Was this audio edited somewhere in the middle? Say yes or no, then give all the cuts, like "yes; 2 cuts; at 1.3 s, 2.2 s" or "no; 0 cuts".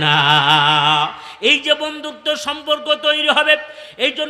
no; 0 cuts